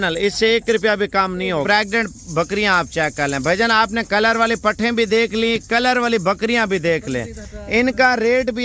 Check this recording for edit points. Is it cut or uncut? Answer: cut